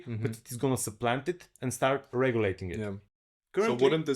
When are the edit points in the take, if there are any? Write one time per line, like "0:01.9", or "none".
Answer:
0:03.1